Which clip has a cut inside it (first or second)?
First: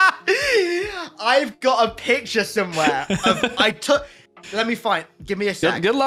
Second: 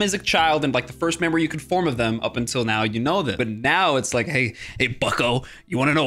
second